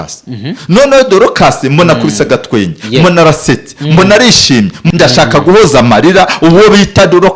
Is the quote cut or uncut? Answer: cut